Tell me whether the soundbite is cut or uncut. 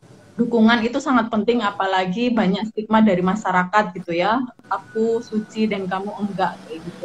cut